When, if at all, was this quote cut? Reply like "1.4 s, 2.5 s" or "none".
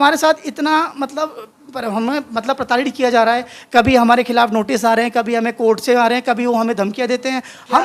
none